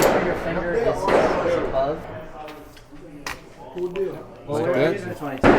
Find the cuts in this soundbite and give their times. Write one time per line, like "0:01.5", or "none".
0:02.0